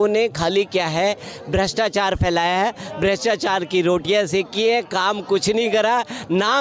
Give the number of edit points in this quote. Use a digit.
0